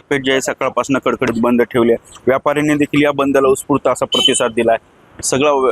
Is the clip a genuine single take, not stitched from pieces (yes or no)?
yes